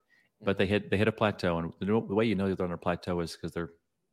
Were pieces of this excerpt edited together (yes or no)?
no